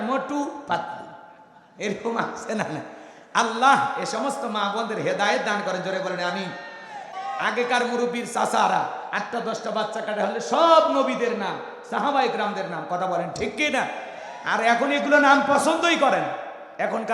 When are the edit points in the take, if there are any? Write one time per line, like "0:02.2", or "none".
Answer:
0:06.9